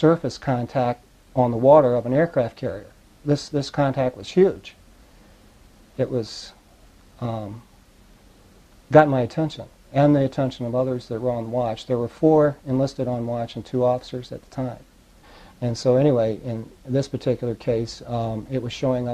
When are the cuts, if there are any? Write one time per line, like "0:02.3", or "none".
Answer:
none